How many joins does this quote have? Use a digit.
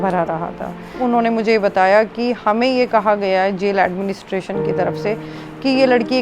1